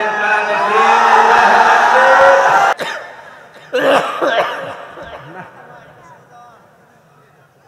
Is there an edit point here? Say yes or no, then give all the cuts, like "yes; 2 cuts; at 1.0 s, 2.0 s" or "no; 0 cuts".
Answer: yes; 1 cut; at 2.7 s